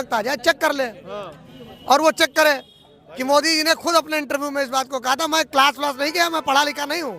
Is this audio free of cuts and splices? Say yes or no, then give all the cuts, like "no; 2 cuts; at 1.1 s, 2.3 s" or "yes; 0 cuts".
yes; 0 cuts